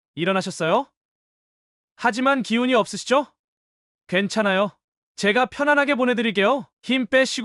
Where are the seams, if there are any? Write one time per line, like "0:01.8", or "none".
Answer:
none